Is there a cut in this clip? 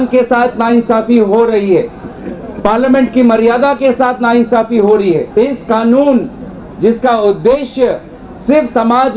yes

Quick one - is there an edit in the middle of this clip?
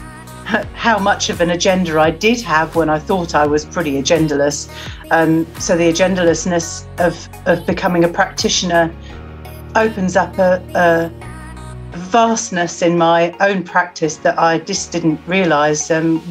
no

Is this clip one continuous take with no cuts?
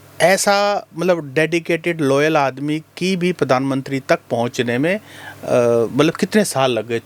yes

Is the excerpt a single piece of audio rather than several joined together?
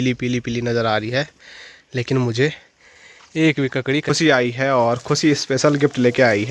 no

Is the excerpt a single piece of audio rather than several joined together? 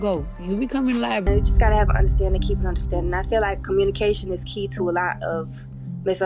no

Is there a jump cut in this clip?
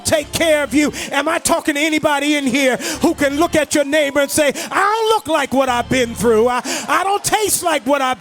no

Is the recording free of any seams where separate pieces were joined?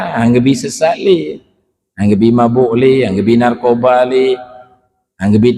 yes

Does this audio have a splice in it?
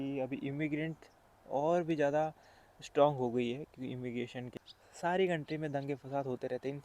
yes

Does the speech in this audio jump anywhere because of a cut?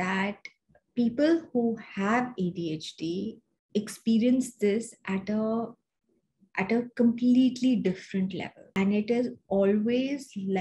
yes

